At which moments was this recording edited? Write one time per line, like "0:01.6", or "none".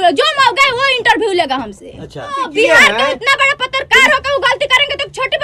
0:02.5